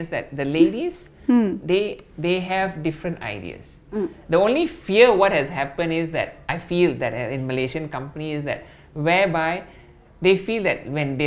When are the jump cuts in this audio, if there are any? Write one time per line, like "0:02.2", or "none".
none